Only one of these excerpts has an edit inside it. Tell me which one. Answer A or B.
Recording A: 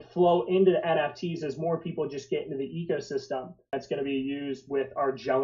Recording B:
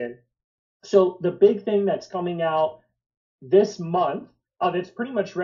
A